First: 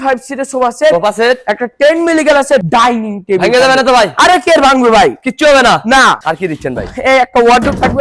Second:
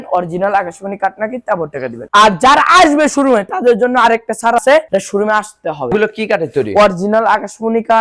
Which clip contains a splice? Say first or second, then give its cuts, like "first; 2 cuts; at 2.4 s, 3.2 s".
second; 2 cuts; at 2.1 s, 5.9 s